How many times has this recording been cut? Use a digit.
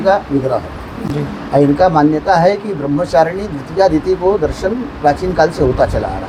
0